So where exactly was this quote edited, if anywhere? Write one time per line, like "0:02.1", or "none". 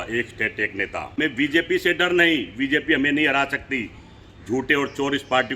0:01.1